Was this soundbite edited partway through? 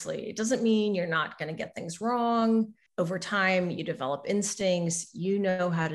yes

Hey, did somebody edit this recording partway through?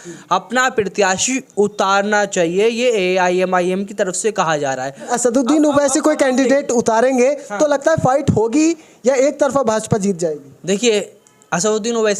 yes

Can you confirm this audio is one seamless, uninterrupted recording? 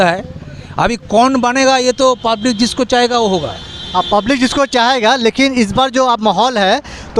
yes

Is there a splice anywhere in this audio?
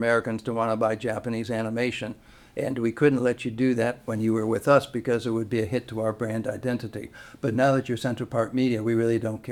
no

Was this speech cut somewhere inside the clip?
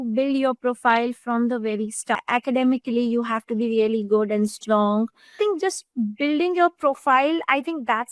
yes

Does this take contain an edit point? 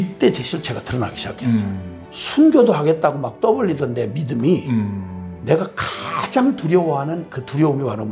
no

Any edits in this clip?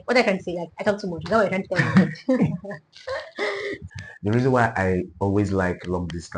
yes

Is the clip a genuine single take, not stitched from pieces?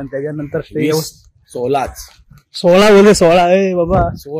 yes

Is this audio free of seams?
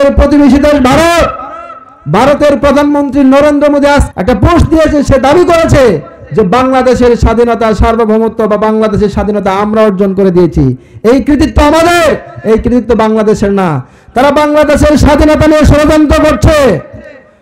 no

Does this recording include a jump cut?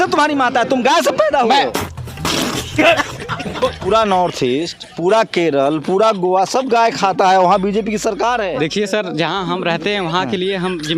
yes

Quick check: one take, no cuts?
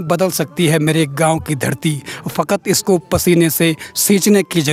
yes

